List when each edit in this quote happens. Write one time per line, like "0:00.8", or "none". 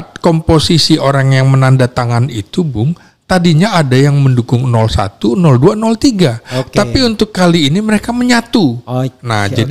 none

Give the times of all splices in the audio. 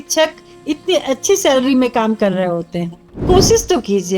0:03.2

